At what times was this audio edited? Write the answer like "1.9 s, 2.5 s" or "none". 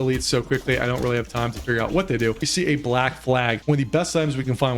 2.5 s, 3.6 s